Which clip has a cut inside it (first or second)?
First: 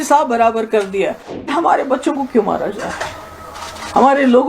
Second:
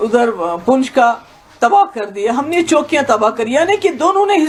first